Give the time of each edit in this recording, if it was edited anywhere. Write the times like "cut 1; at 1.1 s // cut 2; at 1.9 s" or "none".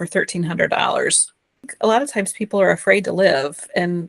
cut 1; at 1.7 s